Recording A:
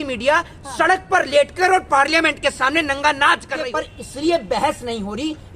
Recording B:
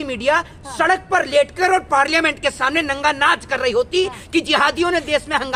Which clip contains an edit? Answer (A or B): A